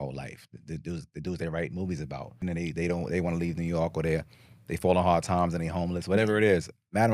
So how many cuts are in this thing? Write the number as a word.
one